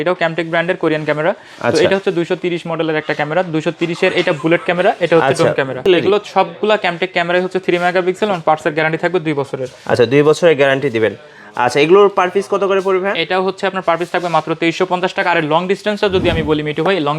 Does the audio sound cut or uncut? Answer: cut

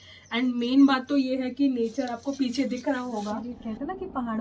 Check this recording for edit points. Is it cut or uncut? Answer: cut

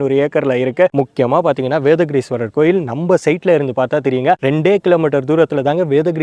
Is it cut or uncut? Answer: uncut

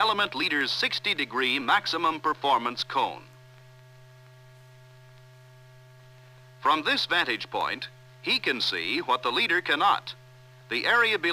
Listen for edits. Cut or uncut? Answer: uncut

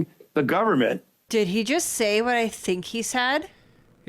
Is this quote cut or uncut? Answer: cut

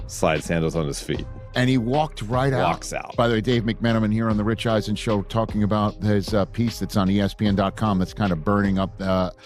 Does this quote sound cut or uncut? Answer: uncut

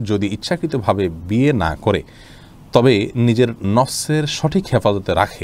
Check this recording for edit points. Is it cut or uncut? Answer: uncut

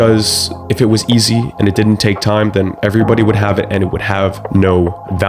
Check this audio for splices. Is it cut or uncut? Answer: uncut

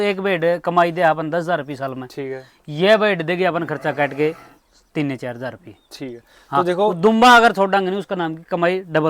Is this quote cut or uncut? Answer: uncut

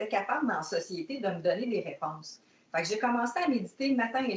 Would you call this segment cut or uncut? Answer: uncut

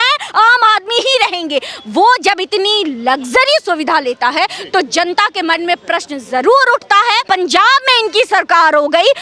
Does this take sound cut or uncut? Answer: cut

